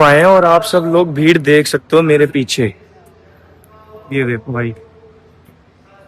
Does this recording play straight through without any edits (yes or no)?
yes